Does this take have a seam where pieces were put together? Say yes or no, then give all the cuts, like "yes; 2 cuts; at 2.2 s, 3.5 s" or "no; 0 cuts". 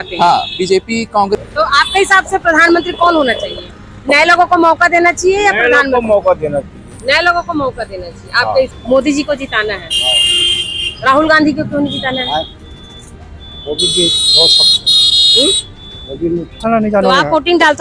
yes; 3 cuts; at 1.4 s, 8.8 s, 16.6 s